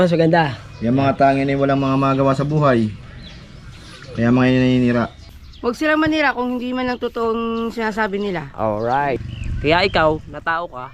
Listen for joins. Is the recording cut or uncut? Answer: cut